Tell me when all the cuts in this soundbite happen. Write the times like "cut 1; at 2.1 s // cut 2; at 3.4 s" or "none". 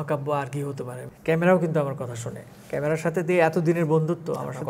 cut 1; at 1.0 s